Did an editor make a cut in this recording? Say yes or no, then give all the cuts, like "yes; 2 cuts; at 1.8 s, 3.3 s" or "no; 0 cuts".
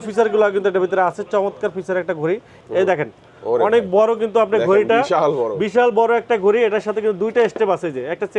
yes; 1 cut; at 2.5 s